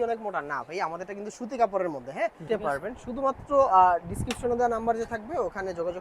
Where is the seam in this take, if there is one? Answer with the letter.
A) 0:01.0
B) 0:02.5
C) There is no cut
B